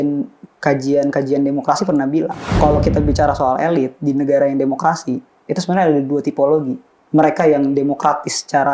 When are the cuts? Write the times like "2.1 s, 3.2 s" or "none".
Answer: 2.4 s